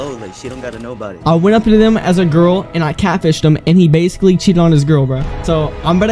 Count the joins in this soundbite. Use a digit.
1